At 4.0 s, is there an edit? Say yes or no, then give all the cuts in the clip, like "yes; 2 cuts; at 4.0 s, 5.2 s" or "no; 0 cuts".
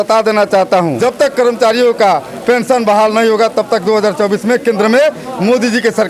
no; 1 cut; at 1.0 s